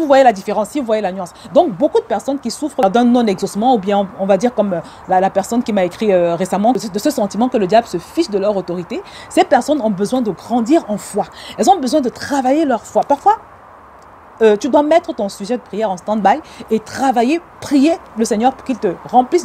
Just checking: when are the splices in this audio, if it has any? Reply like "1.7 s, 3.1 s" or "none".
2.8 s, 6.7 s

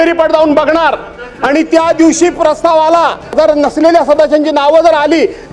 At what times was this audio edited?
none

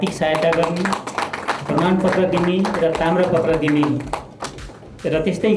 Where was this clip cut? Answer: none

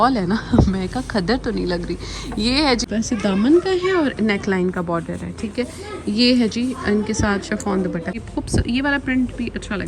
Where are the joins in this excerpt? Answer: 2.9 s, 8.2 s

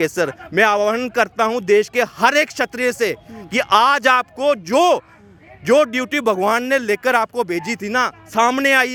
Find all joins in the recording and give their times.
none

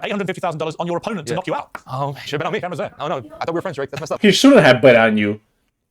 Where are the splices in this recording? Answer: 1.7 s, 4.2 s

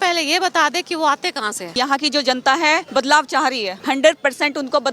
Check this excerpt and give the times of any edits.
1.7 s, 2.9 s, 3.7 s

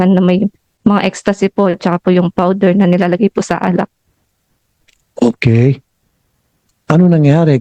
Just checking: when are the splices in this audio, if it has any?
none

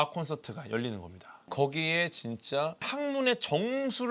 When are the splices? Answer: 1.4 s, 2.9 s

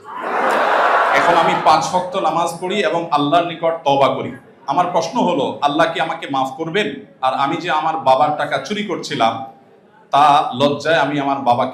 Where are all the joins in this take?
none

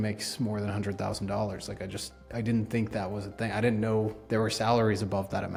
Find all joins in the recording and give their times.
none

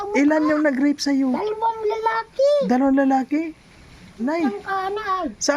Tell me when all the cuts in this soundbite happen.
4.2 s

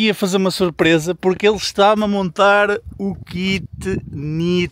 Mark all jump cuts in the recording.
none

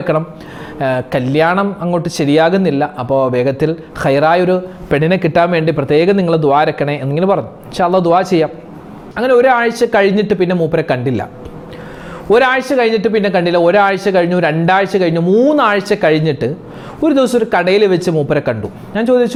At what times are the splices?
none

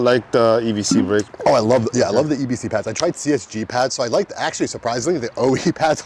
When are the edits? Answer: none

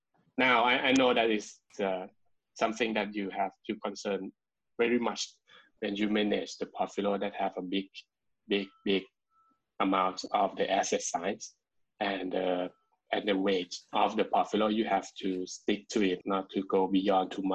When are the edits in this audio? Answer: 16.2 s

